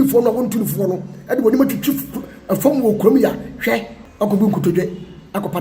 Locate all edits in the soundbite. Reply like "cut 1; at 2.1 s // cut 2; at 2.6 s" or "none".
cut 1; at 4.0 s

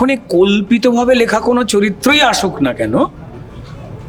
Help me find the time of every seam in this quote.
none

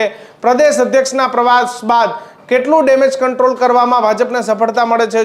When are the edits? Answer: none

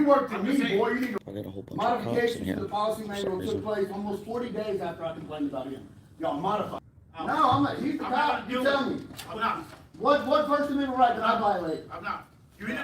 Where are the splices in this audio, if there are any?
cut 1; at 1.2 s // cut 2; at 6.9 s

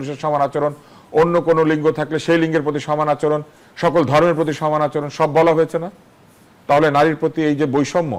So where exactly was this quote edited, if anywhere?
none

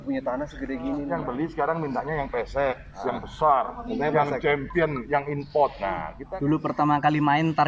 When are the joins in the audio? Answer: cut 1; at 1.1 s // cut 2; at 6.2 s

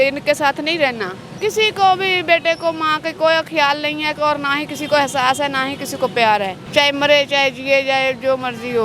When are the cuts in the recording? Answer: cut 1; at 1.3 s // cut 2; at 6.6 s

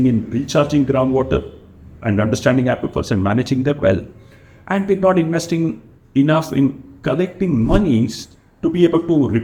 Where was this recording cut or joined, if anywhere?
none

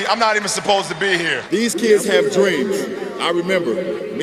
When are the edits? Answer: cut 1; at 1.4 s

